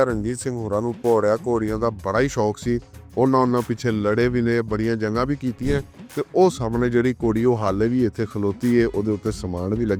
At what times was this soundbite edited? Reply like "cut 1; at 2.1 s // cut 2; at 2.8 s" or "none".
none